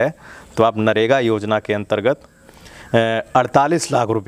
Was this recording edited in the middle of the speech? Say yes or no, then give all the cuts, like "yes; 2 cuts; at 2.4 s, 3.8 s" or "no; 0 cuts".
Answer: no; 0 cuts